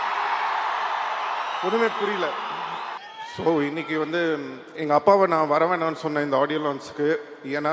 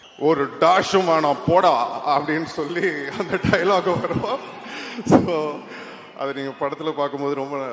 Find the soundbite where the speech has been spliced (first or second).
first